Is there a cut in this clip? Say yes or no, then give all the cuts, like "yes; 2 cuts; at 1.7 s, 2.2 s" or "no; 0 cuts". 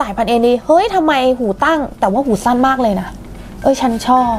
no; 0 cuts